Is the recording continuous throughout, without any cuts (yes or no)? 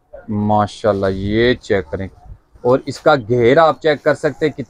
yes